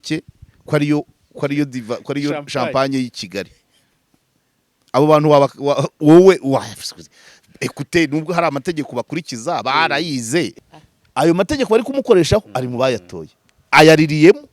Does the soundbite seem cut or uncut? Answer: cut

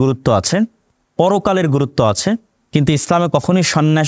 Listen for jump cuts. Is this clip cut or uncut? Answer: uncut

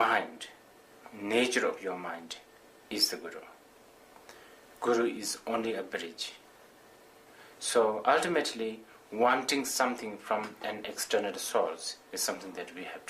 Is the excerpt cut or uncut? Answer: cut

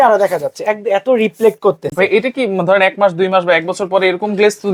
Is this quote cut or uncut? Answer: uncut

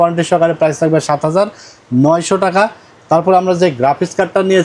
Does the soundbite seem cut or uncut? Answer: uncut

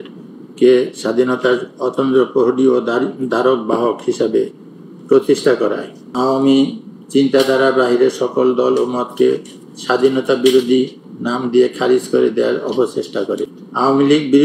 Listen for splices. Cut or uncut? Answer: cut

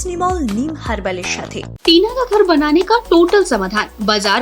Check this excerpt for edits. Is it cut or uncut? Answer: cut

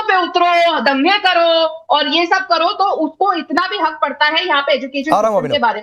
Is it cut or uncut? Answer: uncut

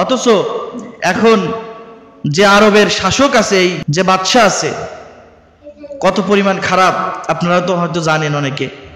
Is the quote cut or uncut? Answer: cut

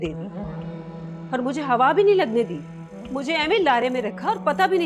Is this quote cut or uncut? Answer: uncut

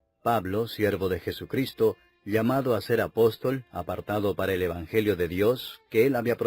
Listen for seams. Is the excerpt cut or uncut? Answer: cut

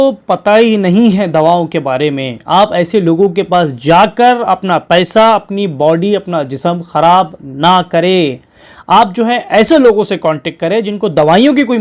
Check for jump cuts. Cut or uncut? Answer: uncut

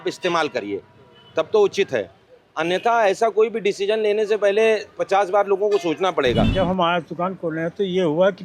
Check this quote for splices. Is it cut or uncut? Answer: cut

